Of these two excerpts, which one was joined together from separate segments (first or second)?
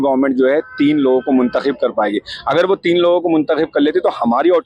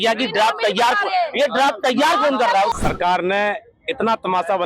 second